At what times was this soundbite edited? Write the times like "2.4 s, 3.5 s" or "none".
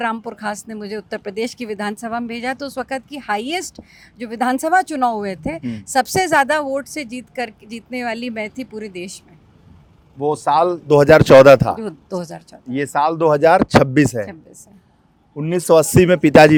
none